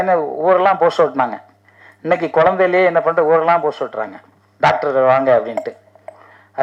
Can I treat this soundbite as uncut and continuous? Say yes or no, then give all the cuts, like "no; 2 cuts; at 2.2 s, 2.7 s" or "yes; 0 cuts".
yes; 0 cuts